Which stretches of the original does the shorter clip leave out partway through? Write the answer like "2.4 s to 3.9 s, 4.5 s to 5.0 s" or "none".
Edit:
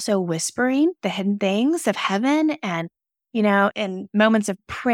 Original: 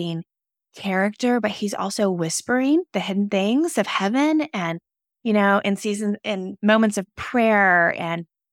5.6 s to 6.2 s

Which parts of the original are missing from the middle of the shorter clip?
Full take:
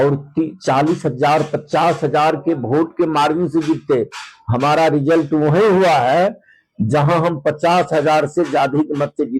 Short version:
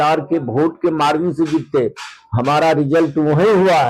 none

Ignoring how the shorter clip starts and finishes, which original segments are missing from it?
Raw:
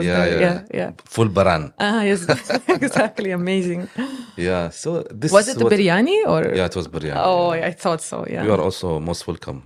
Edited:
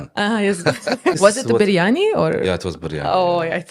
2.8 s to 5.3 s

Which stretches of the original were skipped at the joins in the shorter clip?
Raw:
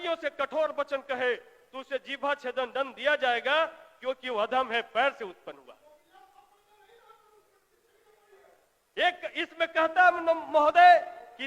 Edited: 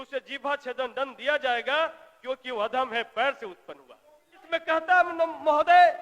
6.2 s to 9.5 s

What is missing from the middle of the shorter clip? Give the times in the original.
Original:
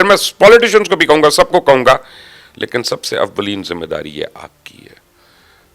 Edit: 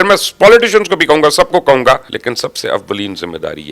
2.1 s to 2.6 s

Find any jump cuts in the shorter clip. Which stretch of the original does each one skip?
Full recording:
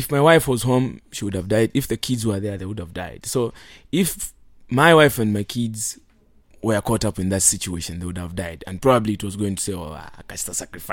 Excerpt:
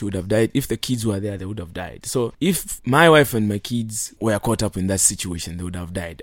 3.7 s to 4.3 s, 5.9 s to 6.4 s

